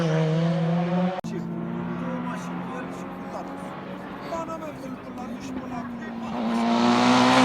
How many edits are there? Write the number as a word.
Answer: one